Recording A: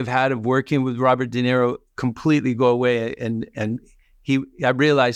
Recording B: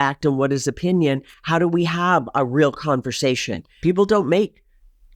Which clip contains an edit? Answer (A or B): B